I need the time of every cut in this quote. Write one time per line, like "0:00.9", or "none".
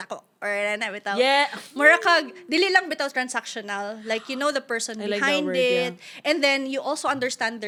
none